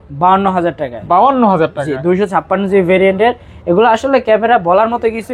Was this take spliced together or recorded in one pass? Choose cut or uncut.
uncut